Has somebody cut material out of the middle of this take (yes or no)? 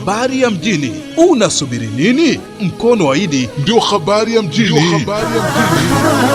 no